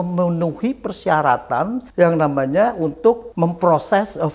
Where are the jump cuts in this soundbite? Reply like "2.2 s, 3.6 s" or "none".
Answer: 1.8 s, 3.3 s

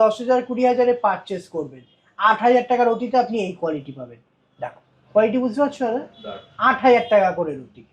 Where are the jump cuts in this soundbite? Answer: none

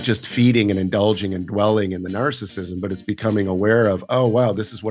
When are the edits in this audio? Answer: none

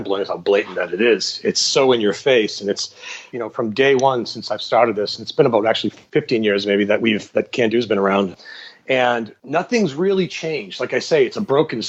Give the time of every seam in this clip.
3.2 s, 5.9 s, 8.3 s, 9.4 s

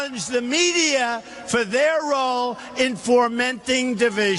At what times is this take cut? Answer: 3.2 s

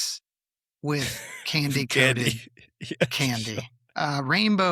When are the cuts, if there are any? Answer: none

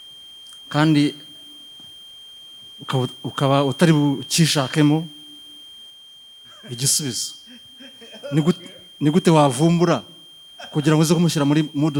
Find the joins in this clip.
none

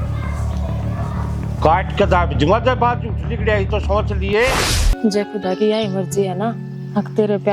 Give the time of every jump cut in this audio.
4.8 s

